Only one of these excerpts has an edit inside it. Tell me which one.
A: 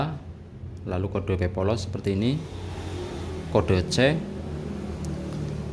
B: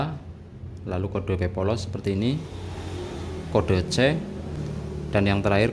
B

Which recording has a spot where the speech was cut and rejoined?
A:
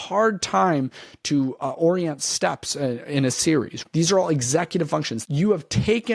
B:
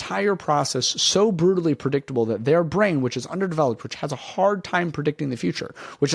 A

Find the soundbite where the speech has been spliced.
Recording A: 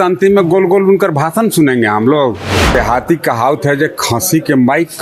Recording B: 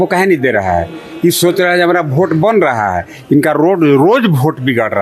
A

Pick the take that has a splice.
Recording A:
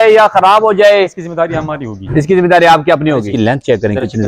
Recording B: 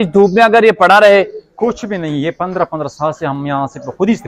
A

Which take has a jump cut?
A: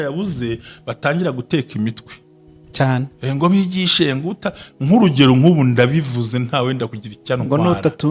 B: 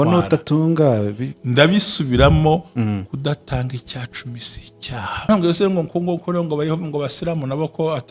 B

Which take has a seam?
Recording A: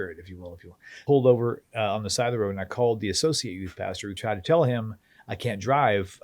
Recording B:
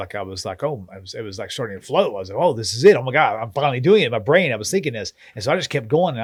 A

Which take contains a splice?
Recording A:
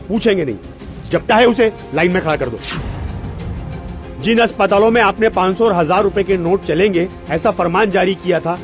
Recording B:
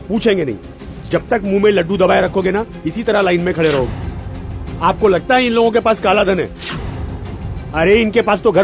B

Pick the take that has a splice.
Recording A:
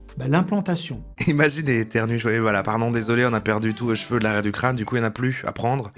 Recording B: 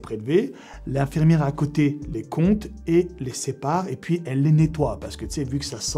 A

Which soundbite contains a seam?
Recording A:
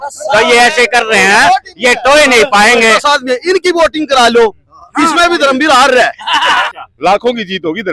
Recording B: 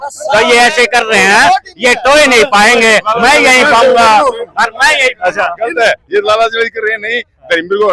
A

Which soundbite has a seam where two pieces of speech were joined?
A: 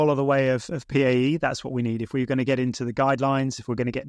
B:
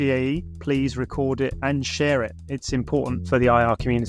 B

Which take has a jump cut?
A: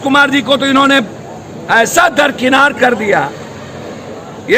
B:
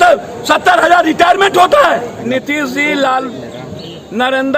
B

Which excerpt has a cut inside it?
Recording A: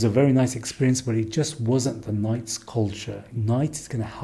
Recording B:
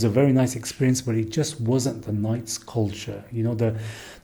A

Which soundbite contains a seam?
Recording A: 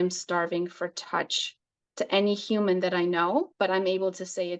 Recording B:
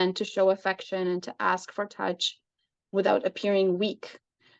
A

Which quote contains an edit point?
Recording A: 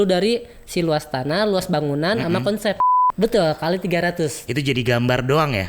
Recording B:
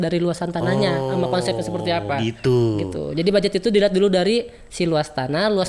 A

